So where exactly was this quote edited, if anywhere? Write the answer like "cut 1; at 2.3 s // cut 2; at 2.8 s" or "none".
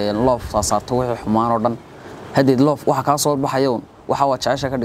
none